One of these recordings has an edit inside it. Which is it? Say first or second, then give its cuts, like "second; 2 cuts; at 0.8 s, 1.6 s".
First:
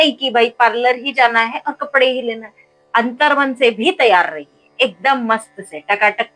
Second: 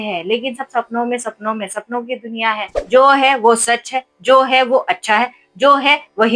second; 1 cut; at 2.7 s